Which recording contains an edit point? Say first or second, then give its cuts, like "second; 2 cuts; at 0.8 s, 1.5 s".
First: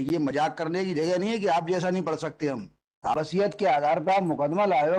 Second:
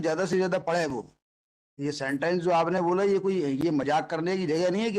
first; 1 cut; at 3.3 s